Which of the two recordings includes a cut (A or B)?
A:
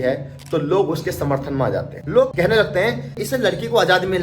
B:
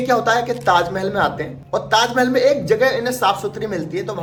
A